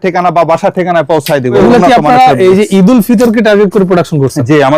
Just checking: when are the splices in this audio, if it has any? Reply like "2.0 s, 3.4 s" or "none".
1.6 s